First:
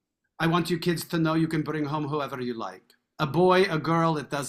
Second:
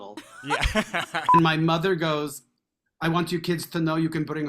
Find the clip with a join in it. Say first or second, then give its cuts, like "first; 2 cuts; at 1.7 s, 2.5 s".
second; 1 cut; at 1.3 s